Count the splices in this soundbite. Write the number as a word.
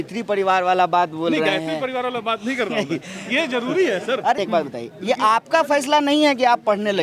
one